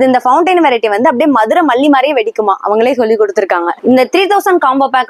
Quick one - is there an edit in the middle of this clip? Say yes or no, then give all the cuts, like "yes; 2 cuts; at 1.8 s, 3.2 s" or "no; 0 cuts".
yes; 1 cut; at 3.7 s